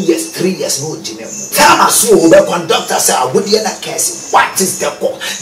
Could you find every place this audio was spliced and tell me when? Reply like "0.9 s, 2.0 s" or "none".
1.5 s